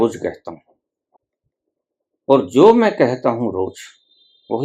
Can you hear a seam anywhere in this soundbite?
yes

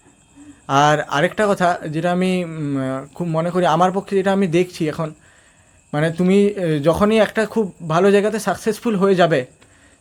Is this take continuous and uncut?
yes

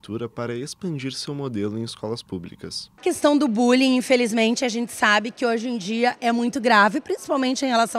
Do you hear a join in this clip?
yes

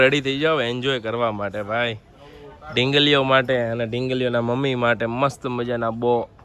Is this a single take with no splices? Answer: yes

